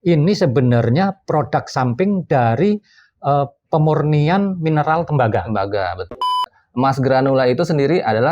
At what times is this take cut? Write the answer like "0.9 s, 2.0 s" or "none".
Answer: 6.4 s